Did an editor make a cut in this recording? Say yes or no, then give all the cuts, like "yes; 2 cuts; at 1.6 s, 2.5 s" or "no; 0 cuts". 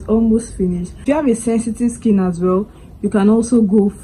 yes; 1 cut; at 1.0 s